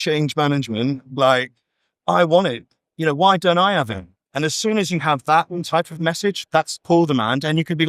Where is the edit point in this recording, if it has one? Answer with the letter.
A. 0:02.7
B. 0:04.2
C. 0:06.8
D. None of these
C